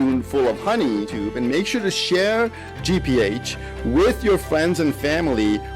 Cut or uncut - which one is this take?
cut